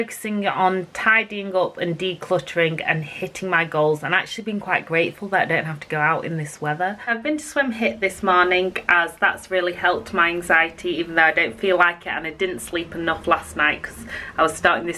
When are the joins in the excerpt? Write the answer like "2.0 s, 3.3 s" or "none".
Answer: 7.2 s